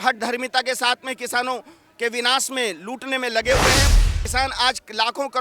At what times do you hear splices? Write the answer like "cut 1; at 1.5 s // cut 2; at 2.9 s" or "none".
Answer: cut 1; at 3.9 s

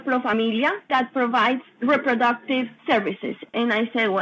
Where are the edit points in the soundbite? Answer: cut 1; at 1.7 s // cut 2; at 3.0 s

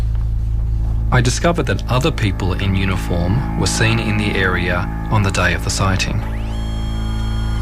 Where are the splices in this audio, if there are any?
cut 1; at 2.6 s

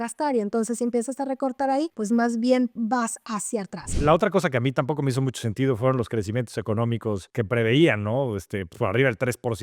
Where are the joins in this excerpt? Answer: cut 1; at 3.9 s

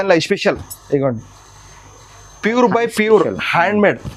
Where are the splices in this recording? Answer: none

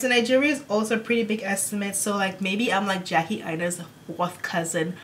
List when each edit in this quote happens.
none

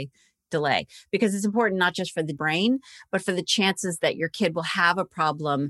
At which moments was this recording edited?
cut 1; at 2.4 s

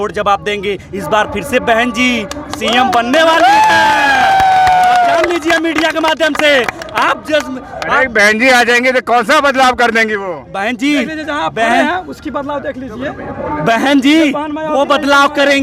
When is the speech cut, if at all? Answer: none

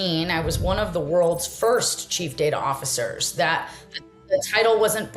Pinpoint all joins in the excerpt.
none

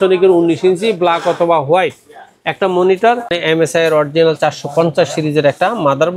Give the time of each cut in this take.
cut 1; at 3.3 s

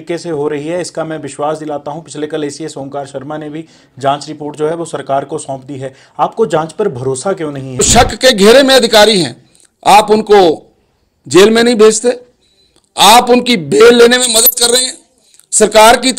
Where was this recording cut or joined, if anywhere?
cut 1; at 7.9 s

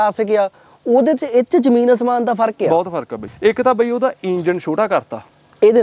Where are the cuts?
cut 1; at 3.2 s

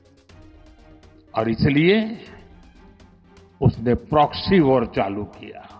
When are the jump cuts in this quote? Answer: none

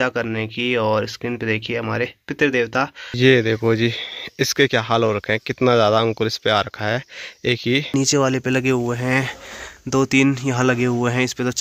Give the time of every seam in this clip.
cut 1; at 3.2 s // cut 2; at 7.9 s

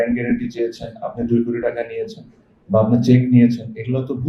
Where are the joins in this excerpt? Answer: none

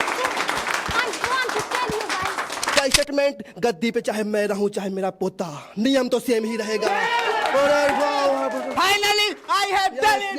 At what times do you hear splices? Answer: cut 1; at 2.8 s

